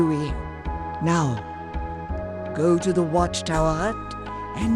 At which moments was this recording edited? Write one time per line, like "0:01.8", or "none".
none